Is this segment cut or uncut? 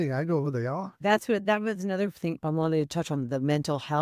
cut